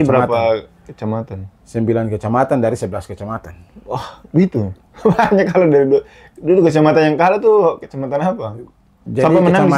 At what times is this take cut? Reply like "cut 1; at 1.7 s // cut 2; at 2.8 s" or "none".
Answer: cut 1; at 4.8 s